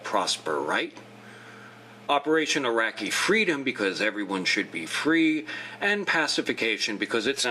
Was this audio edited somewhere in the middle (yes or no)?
no